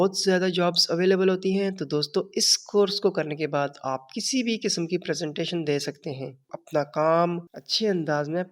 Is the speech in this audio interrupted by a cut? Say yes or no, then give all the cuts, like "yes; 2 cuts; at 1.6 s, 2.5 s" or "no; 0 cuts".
yes; 1 cut; at 6.5 s